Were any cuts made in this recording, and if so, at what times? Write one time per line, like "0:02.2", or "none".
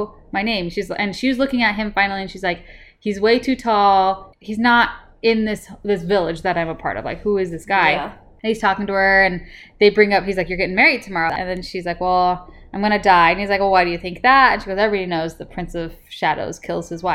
0:04.3
0:11.3